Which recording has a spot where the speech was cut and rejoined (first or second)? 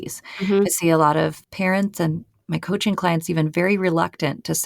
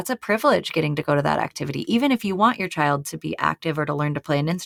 first